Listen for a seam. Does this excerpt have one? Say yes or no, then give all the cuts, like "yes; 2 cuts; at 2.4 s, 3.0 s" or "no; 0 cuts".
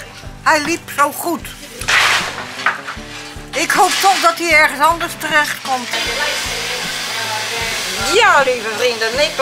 yes; 1 cut; at 6.2 s